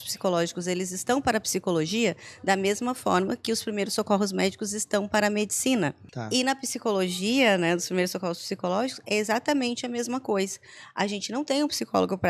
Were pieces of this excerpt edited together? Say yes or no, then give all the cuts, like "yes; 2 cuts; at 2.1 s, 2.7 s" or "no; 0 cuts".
yes; 1 cut; at 6.1 s